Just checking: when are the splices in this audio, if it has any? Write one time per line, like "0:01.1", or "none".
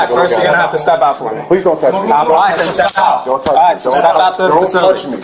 none